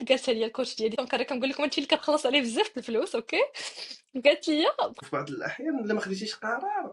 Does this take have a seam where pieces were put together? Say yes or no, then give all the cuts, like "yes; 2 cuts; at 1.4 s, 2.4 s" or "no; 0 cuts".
yes; 2 cuts; at 1.0 s, 5.0 s